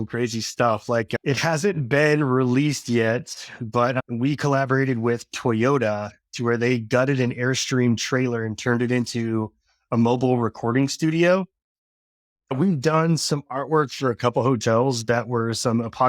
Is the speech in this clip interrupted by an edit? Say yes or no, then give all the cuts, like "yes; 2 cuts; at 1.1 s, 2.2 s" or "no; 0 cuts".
yes; 2 cuts; at 1.2 s, 12.5 s